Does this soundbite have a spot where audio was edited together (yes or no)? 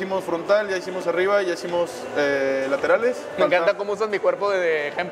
no